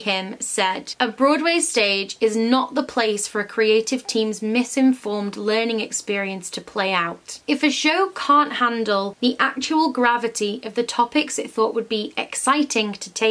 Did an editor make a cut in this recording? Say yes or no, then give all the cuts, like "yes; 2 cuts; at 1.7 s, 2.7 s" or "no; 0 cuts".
no; 0 cuts